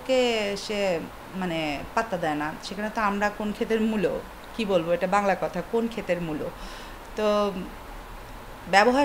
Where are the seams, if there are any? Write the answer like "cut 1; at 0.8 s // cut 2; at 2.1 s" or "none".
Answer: none